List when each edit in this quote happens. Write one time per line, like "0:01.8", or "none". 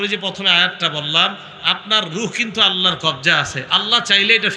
none